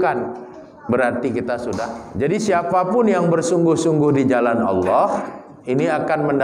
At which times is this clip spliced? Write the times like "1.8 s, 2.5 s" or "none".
2.0 s